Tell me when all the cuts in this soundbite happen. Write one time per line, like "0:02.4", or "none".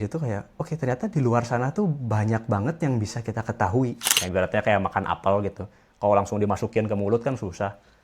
0:04.1